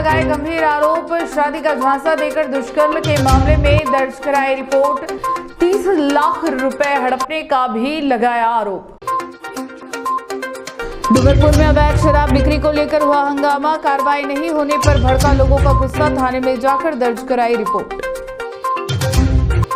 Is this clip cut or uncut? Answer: uncut